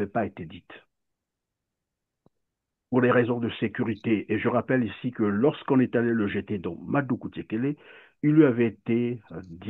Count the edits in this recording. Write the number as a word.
zero